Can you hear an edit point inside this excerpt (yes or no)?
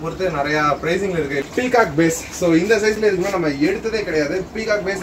yes